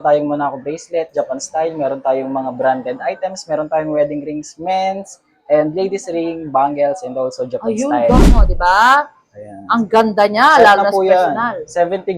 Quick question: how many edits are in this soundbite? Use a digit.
1